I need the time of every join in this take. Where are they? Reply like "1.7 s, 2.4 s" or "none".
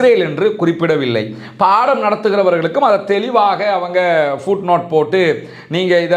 none